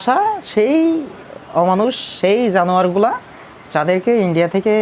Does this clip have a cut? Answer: no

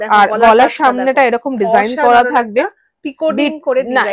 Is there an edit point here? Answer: no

